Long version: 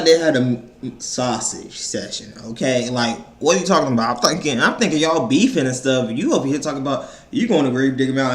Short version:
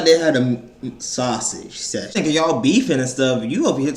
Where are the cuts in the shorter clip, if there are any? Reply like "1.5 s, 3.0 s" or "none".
2.1 s